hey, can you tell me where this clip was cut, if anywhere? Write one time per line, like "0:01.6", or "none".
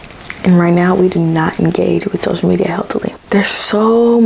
0:03.2